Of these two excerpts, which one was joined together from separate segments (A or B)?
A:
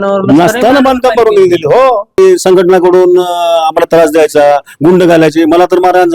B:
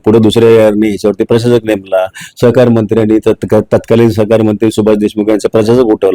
A